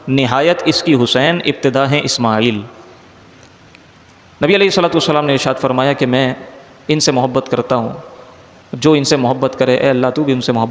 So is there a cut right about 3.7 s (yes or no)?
yes